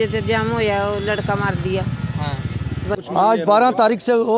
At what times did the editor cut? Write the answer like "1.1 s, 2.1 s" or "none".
3.0 s